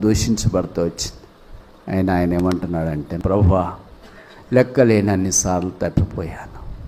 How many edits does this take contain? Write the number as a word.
one